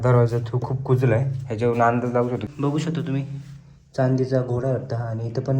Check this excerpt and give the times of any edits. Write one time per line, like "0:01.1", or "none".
0:02.5